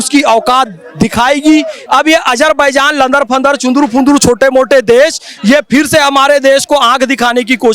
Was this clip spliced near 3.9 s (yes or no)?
no